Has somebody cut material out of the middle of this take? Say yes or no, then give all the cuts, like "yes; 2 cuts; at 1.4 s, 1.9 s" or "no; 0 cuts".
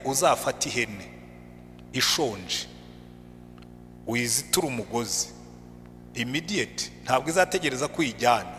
no; 0 cuts